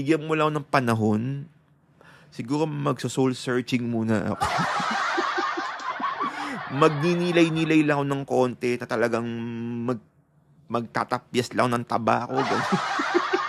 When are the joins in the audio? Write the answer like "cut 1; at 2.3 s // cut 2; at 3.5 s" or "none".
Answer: none